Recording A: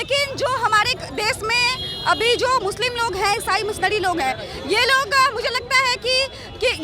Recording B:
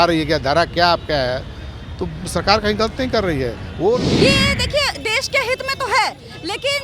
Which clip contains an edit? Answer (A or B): B